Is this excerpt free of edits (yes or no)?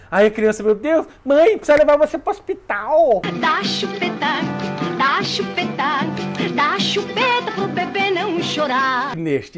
no